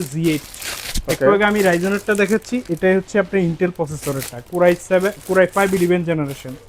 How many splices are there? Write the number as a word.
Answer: zero